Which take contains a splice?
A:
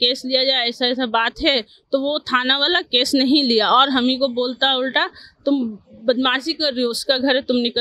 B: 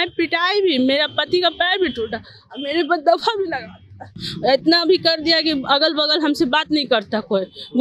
B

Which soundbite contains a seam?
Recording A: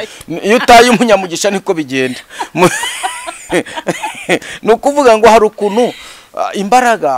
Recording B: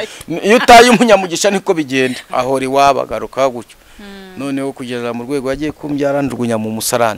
B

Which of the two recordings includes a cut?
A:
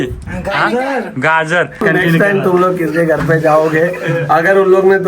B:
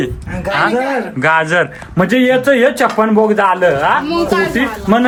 A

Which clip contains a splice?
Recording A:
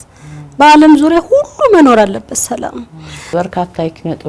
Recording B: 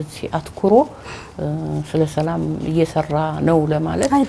A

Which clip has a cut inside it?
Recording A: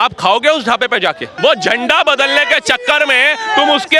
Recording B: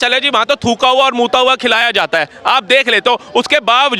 A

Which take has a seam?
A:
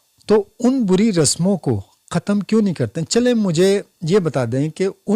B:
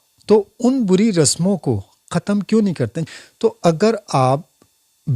B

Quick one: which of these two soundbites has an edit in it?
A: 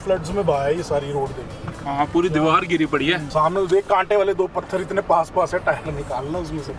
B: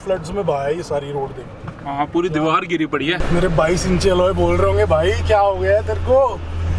B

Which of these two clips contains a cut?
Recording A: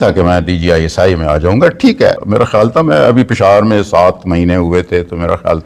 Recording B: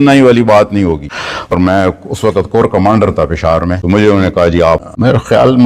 B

